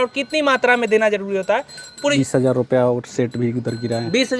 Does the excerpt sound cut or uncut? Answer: cut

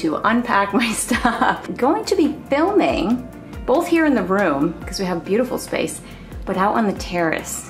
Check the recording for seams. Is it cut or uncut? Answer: cut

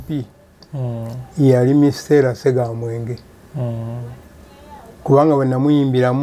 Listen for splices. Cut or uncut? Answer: uncut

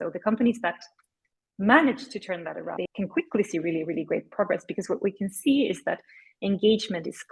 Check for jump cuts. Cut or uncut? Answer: cut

